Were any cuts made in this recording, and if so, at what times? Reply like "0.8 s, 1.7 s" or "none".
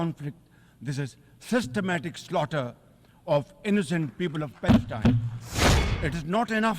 5.9 s